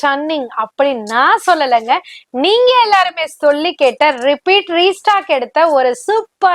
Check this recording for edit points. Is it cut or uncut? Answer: uncut